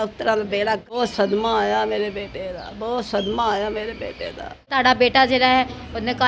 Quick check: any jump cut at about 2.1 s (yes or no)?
no